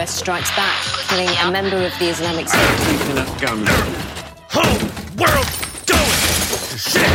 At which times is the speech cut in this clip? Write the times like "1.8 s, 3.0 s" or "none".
none